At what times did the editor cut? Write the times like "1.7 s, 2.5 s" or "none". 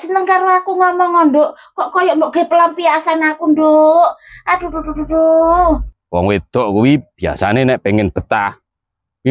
6.0 s